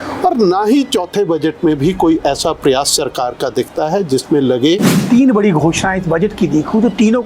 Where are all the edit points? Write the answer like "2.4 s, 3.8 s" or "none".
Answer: 5.0 s